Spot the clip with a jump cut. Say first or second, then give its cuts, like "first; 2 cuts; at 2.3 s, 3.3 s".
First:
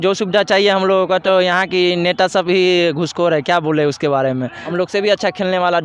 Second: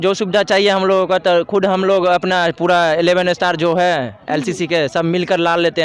first; 2 cuts; at 1.2 s, 4.6 s